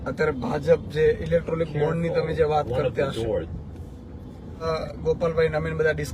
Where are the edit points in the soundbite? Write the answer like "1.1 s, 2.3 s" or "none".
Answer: 4.6 s